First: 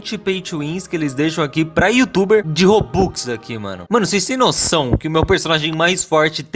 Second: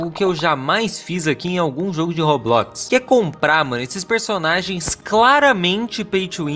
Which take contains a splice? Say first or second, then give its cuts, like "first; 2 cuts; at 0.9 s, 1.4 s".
first; 1 cut; at 3.7 s